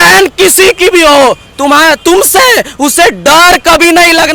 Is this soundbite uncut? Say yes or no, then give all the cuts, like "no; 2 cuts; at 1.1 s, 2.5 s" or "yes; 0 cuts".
yes; 0 cuts